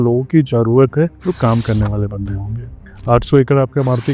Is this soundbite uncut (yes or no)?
no